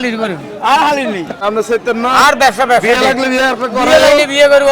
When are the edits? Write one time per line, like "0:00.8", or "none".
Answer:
0:01.4